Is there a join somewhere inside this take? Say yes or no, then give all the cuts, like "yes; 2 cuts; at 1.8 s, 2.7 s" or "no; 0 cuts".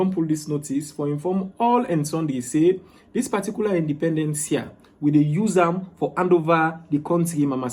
no; 0 cuts